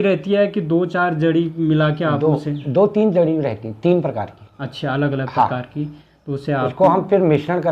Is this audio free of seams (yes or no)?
yes